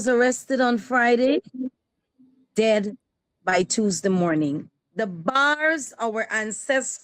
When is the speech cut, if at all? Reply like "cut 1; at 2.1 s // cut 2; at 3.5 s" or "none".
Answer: cut 1; at 4.8 s

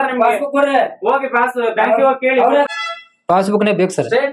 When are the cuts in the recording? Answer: cut 1; at 2.7 s

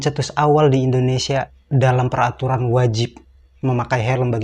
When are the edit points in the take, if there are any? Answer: cut 1; at 1.6 s

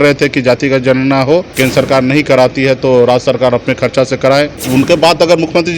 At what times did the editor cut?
cut 1; at 1.5 s // cut 2; at 4.6 s

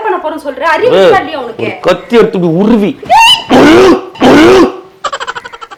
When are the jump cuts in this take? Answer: none

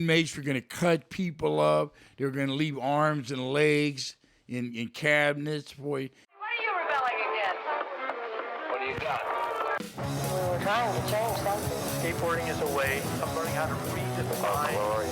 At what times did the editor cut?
cut 1; at 6.2 s

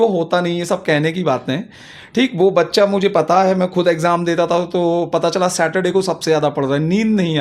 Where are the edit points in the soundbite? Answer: none

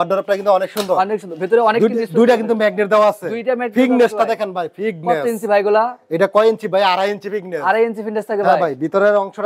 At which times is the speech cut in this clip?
none

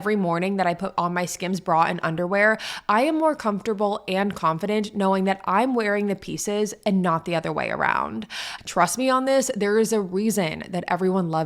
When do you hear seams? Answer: cut 1; at 8.4 s

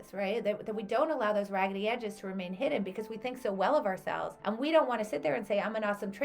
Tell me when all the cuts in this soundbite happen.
cut 1; at 4.3 s

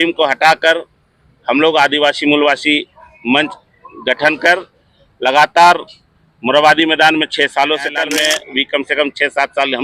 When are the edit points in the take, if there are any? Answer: cut 1; at 8.0 s

